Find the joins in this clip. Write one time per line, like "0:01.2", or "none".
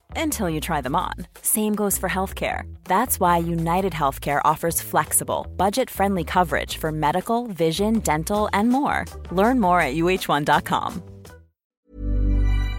0:11.9